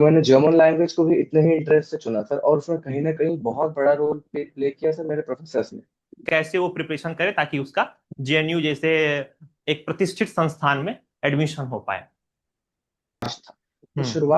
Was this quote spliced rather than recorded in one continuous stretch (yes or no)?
yes